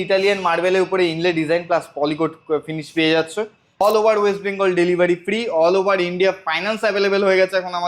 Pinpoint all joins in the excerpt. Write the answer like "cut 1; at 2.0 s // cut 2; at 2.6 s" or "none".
cut 1; at 3.8 s